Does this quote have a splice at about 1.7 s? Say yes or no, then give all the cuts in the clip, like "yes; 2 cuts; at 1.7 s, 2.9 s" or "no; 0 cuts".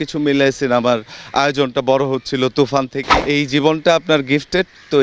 no; 1 cut; at 3.1 s